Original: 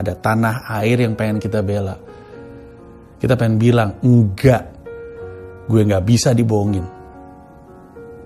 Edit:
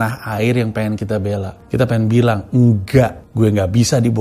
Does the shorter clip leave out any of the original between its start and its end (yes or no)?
yes